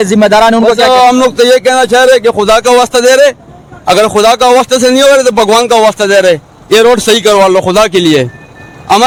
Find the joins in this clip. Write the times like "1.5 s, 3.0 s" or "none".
none